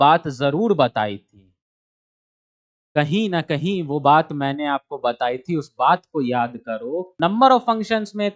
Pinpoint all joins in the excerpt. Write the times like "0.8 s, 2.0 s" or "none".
7.1 s